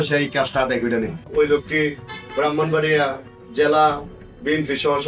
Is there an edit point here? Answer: yes; 1 cut; at 1.3 s

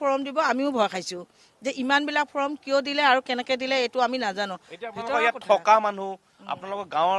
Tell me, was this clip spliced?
no; 0 cuts

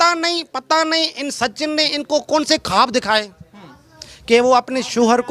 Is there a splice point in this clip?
no; 0 cuts

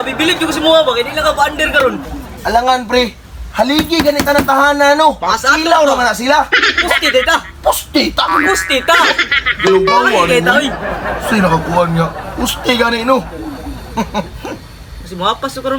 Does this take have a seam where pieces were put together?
no; 0 cuts

